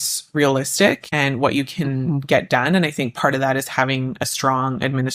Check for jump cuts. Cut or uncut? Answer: cut